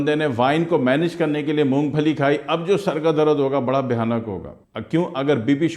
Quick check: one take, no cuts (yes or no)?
yes